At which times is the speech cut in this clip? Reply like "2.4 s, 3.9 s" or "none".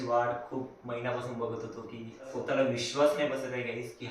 2.3 s